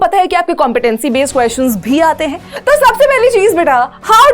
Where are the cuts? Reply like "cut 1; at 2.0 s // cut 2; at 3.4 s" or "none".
cut 1; at 2.5 s

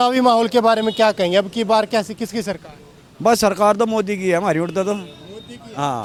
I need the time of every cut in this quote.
none

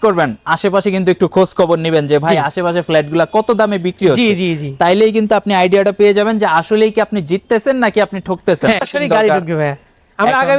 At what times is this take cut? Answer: cut 1; at 8.9 s

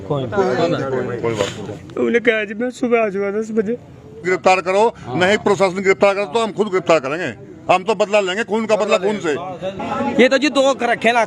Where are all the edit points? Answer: cut 1; at 4.2 s // cut 2; at 9.7 s

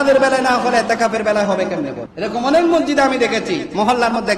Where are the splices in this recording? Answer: cut 1; at 2.0 s

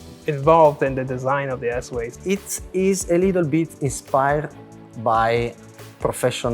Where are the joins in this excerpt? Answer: cut 1; at 2.1 s

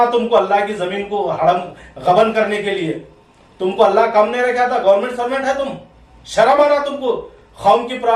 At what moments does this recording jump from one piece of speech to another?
none

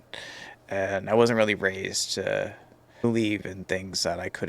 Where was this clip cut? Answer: cut 1; at 3.0 s

